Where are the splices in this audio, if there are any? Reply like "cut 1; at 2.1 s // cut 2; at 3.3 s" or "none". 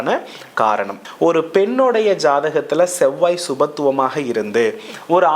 cut 1; at 1.0 s